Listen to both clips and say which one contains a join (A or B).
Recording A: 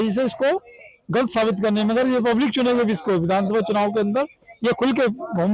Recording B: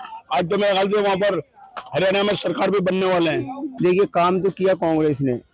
B